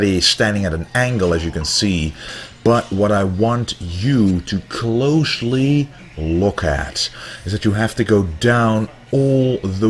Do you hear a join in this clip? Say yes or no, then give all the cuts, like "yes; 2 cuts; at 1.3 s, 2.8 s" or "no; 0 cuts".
no; 0 cuts